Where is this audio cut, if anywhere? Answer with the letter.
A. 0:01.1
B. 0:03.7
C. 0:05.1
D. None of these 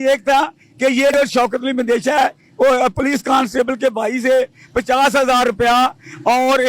A